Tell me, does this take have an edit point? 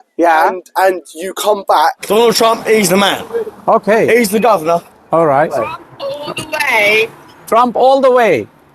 yes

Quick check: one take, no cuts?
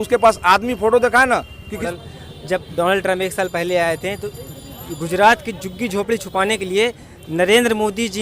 no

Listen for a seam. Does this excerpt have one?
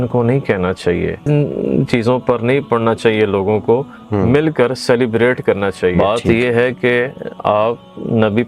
yes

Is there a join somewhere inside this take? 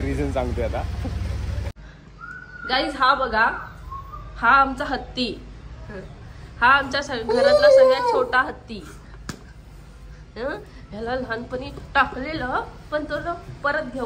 yes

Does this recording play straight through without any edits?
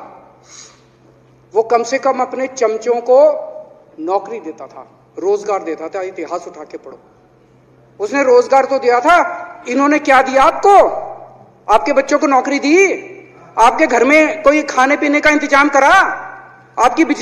yes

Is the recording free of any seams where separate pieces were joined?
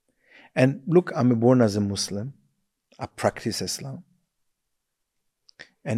yes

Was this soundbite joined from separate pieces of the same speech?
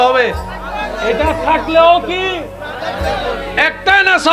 no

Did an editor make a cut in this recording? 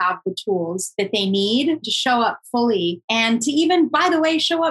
yes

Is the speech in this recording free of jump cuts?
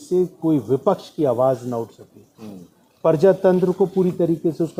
yes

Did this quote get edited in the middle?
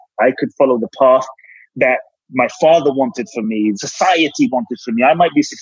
yes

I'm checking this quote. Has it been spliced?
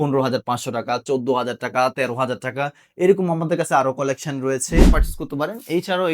yes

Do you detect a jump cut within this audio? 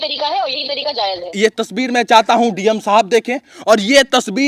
yes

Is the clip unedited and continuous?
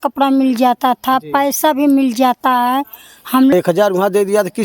no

